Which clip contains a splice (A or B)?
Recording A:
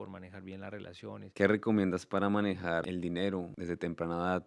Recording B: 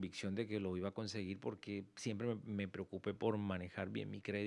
A